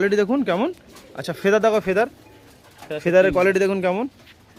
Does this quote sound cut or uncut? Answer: uncut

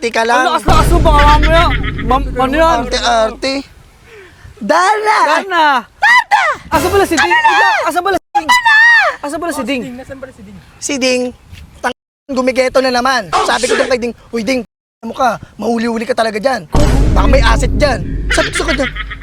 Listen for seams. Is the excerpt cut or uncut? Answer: uncut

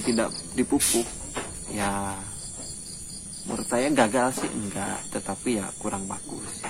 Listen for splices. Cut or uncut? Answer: uncut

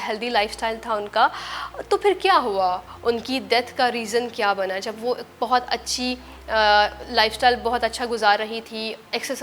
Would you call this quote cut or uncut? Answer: uncut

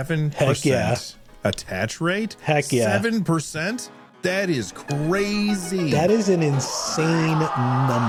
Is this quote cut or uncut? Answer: uncut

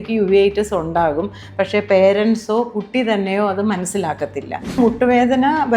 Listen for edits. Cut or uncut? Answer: cut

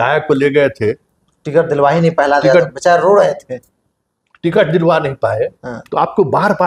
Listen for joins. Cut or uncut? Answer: uncut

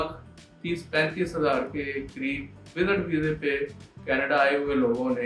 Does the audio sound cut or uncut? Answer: uncut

